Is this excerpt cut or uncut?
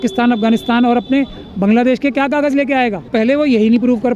cut